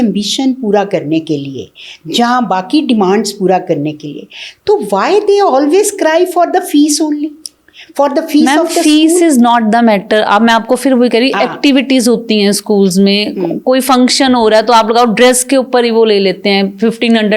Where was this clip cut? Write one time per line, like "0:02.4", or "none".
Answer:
none